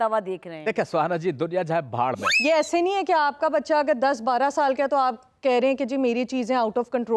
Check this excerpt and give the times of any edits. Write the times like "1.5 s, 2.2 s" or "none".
2.3 s